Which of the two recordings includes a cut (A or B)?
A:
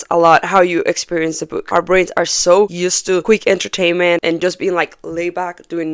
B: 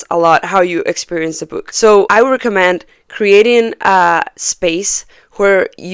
A